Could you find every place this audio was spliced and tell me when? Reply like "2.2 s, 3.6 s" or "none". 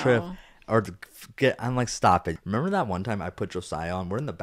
2.3 s